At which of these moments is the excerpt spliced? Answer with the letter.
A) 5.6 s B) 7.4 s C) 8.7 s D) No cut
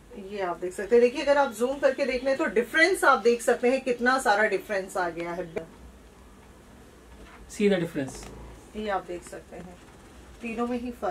A